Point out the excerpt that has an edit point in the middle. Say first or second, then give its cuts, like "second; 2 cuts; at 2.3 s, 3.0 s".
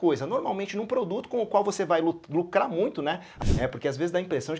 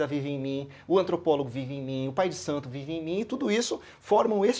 first; 1 cut; at 3.3 s